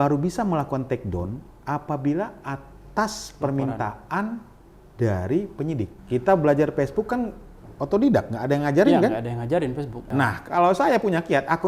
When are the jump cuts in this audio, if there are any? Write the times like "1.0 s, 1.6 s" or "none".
6.0 s, 10.0 s